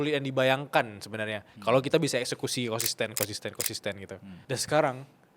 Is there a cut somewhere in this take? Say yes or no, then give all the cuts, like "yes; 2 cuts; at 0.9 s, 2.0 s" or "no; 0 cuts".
yes; 1 cut; at 4.3 s